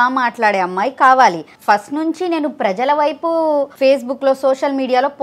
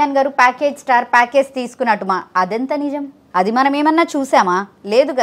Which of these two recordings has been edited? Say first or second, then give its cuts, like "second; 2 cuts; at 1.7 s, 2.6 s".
first; 2 cuts; at 1.5 s, 3.7 s